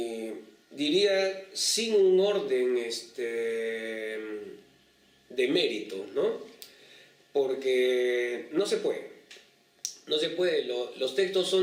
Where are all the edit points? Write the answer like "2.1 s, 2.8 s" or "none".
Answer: none